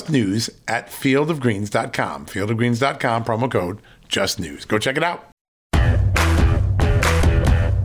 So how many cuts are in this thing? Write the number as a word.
one